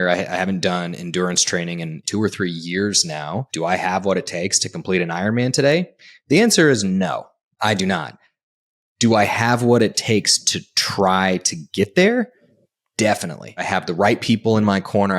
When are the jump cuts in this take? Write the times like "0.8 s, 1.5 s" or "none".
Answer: 2.0 s, 3.5 s, 13.7 s